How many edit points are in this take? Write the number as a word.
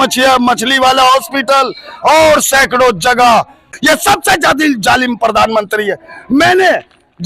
one